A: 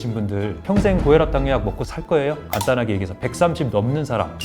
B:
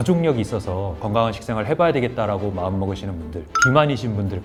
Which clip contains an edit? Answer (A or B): A